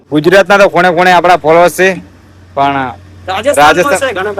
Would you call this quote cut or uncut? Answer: uncut